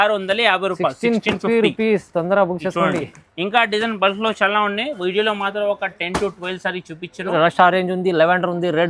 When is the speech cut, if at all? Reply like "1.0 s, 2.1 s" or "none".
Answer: 7.3 s